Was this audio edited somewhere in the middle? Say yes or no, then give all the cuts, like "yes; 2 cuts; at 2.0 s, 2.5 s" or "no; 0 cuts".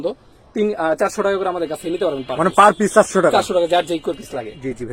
no; 0 cuts